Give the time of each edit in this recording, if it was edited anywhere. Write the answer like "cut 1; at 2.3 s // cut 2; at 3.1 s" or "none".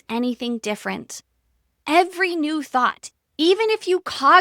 cut 1; at 1.8 s // cut 2; at 3.1 s